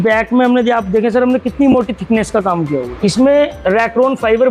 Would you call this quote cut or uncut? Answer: cut